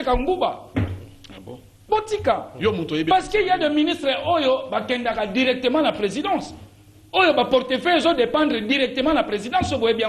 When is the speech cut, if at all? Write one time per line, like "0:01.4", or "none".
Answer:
none